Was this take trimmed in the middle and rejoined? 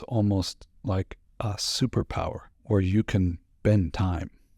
yes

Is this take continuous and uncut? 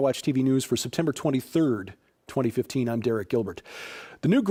yes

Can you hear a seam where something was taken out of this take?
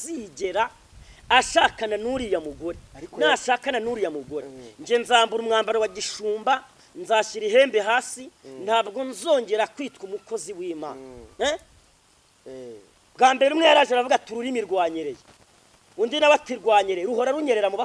no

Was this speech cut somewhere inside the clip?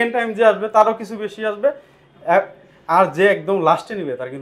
no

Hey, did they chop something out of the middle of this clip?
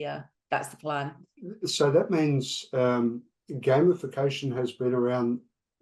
yes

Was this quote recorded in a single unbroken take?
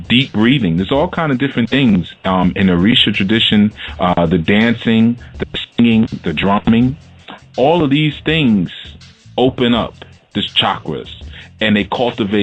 yes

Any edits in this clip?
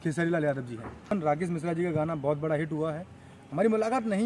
yes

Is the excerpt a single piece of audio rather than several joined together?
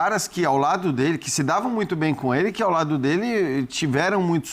yes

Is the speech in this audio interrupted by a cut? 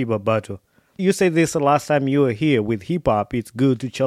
yes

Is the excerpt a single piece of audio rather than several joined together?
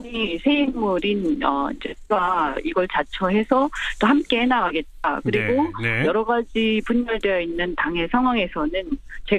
no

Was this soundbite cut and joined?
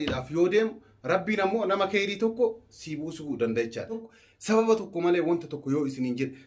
yes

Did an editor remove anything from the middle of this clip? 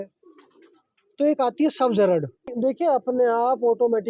yes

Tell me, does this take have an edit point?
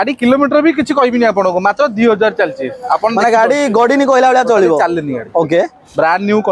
no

